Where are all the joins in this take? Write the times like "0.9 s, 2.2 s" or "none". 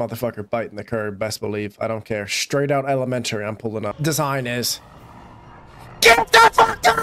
3.9 s

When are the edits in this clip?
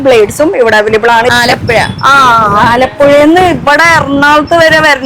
1.3 s

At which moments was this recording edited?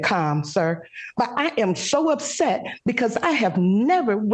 none

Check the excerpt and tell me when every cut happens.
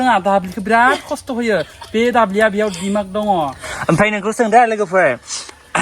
3.7 s

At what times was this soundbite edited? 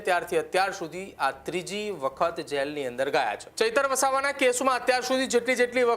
3.5 s

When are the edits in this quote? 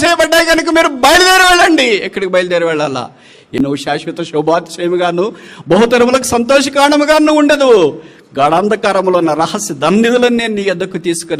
3.6 s

